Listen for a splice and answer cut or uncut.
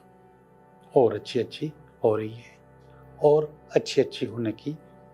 uncut